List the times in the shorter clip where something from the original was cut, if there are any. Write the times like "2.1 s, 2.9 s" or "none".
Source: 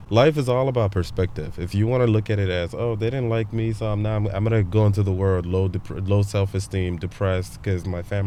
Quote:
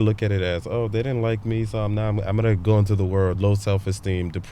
3.4 s